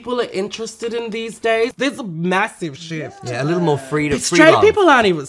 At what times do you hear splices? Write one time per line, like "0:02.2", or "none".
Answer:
0:01.7